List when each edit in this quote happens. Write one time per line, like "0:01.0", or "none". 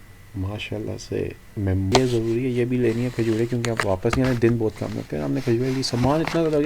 0:01.9